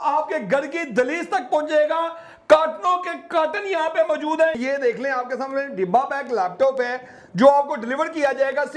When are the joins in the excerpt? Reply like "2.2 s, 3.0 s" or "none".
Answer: 4.6 s